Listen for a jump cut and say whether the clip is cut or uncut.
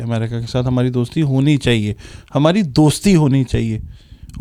uncut